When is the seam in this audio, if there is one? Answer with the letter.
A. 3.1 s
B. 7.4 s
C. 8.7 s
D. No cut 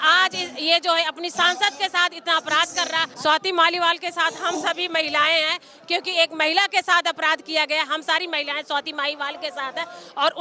A